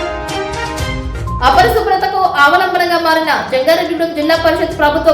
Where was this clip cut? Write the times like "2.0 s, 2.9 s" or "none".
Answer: 0.9 s